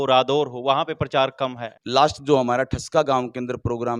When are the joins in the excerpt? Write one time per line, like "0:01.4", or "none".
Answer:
0:01.7